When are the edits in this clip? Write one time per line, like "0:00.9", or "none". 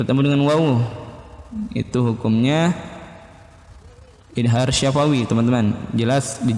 none